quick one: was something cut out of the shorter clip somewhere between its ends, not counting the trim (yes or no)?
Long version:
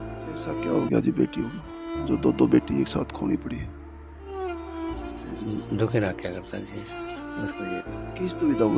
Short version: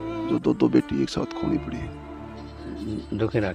yes